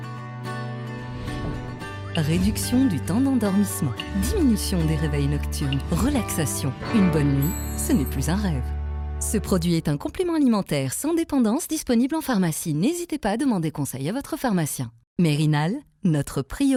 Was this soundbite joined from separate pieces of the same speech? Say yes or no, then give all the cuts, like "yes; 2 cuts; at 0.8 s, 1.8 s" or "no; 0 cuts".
no; 0 cuts